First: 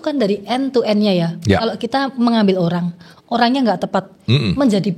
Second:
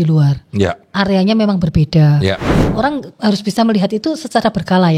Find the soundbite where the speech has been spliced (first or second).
second